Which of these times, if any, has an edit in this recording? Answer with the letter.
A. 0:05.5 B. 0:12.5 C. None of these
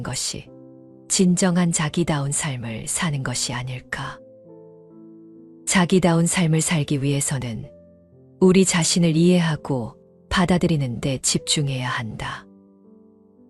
B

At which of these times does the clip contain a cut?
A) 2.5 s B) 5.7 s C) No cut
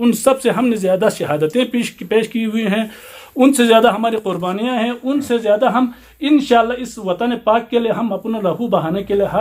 C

